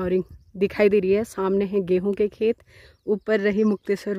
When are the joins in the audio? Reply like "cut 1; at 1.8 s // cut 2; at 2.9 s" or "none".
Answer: none